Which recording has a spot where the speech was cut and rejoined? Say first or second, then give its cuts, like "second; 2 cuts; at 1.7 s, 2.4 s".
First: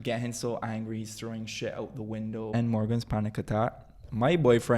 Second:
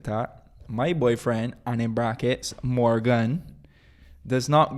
first; 1 cut; at 2.5 s